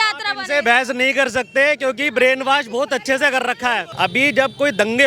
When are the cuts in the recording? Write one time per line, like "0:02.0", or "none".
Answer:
0:03.9